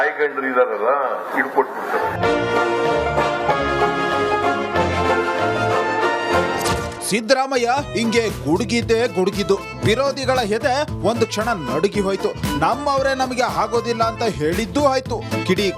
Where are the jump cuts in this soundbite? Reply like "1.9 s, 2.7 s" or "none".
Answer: 1.2 s